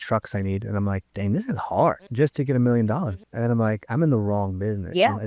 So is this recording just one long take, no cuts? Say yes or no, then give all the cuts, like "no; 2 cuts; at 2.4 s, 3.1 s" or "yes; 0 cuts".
no; 3 cuts; at 1.1 s, 2.1 s, 3.2 s